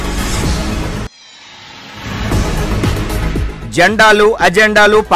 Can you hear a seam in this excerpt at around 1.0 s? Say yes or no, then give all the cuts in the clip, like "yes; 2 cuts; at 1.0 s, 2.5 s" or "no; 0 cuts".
no; 0 cuts